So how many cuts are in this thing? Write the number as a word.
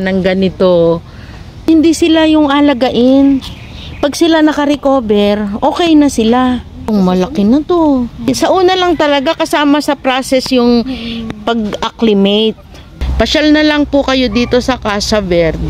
four